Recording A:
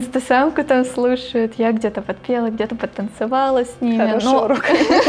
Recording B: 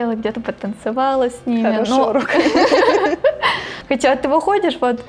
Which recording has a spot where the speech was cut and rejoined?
B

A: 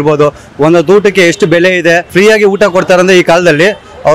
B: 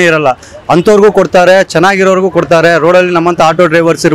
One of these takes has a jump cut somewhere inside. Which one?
A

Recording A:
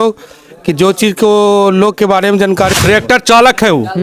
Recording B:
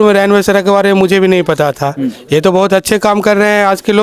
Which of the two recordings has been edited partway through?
A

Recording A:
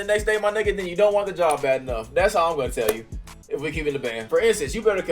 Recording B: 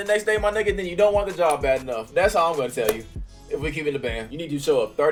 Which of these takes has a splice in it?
A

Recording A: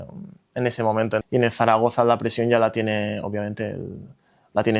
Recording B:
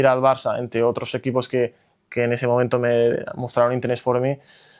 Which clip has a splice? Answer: A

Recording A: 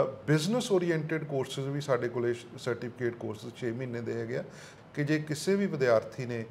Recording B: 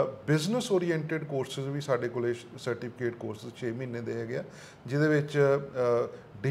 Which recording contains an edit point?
A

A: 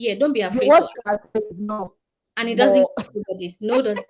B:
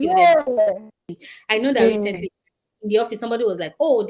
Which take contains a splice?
B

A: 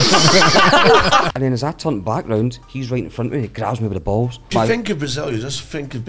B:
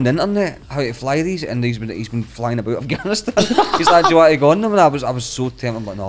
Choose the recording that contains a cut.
A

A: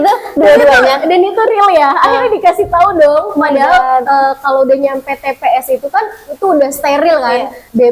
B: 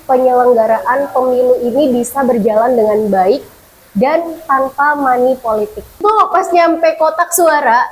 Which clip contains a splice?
B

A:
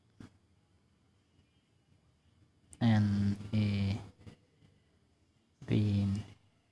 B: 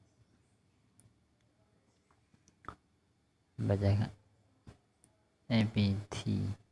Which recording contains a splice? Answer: B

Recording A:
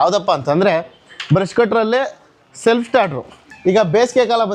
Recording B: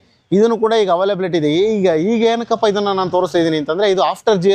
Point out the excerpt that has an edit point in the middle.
A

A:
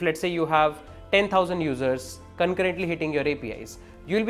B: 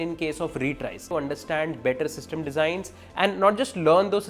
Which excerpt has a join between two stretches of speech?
B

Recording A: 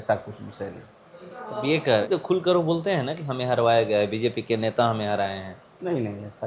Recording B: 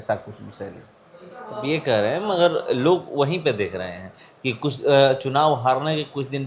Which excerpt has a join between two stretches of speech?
A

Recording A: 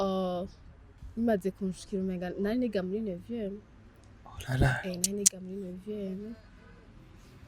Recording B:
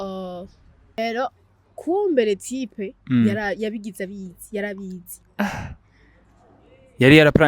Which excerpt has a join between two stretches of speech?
B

